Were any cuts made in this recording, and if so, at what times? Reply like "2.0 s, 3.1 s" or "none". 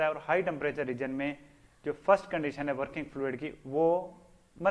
none